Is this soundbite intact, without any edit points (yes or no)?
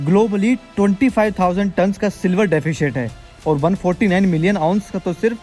yes